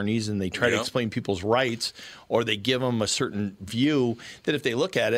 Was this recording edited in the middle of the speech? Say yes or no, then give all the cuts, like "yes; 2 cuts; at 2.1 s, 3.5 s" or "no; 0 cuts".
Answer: no; 0 cuts